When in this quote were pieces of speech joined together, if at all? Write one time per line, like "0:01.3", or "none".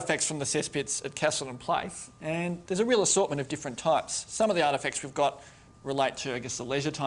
0:04.2